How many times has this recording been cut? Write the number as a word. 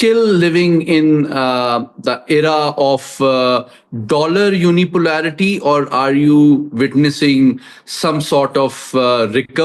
zero